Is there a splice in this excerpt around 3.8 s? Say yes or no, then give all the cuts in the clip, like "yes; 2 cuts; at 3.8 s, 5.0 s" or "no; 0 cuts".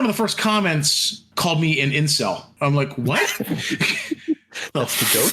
no; 2 cuts; at 1.3 s, 2.5 s